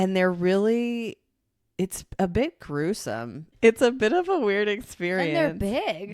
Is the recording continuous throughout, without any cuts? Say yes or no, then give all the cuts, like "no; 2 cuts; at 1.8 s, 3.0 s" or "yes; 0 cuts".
no; 1 cut; at 3.5 s